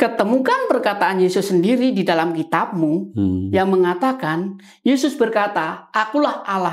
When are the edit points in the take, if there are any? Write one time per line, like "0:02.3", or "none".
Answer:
none